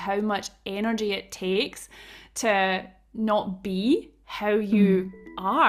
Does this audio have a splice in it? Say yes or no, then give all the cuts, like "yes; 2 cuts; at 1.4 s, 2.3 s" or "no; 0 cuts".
no; 0 cuts